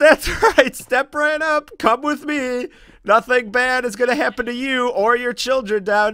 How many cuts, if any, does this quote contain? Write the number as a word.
zero